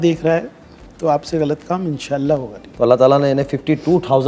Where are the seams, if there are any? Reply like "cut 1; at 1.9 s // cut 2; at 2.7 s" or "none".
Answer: cut 1; at 2.6 s

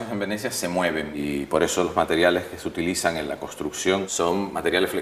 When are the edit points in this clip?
none

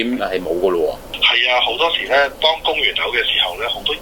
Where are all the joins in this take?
none

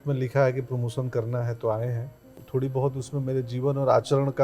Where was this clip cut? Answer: cut 1; at 2.3 s

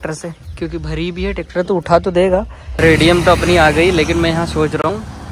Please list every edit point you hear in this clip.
cut 1; at 2.9 s

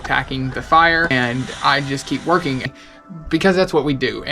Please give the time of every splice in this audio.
cut 1; at 1.1 s // cut 2; at 2.7 s

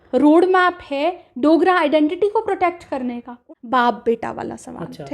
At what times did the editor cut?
cut 1; at 3.3 s

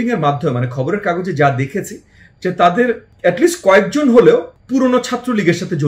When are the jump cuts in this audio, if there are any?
cut 1; at 3.1 s // cut 2; at 4.6 s

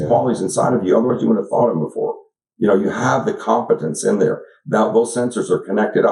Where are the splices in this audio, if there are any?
none

